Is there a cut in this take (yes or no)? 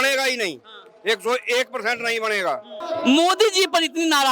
yes